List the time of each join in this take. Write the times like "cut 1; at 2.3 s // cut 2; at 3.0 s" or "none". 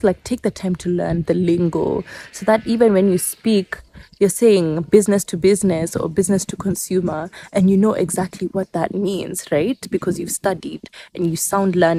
none